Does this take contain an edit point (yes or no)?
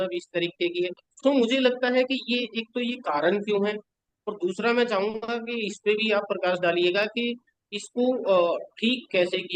yes